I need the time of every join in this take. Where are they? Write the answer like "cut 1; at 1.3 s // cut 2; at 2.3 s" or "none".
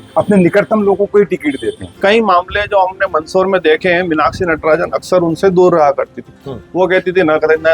cut 1; at 2.0 s